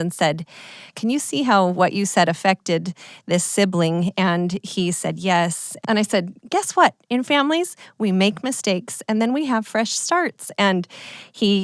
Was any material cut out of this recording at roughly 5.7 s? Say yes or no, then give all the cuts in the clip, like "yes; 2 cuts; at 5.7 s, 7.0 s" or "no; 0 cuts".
yes; 2 cuts; at 0.8 s, 5.7 s